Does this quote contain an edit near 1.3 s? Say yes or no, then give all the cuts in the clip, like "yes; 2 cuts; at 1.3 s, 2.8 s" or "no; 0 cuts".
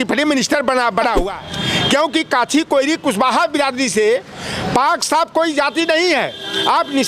yes; 1 cut; at 1.3 s